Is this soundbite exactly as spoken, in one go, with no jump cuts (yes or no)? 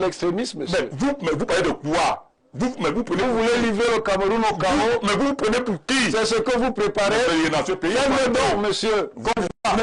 yes